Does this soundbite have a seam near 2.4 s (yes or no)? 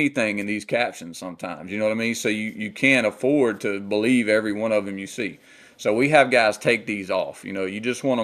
no